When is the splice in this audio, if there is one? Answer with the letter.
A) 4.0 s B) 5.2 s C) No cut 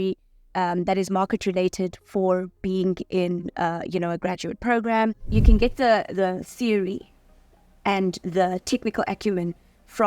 B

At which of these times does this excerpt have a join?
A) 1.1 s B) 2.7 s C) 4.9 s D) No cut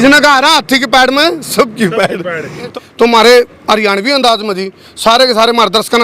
B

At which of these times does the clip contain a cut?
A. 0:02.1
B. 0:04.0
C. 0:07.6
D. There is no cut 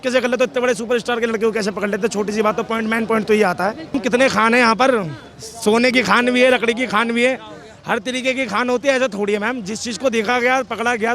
B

